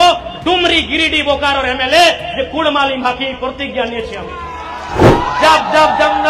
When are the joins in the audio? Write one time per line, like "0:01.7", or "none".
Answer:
0:05.0